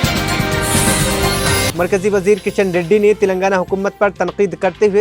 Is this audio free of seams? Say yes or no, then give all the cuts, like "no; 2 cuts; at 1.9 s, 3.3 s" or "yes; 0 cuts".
no; 1 cut; at 1.7 s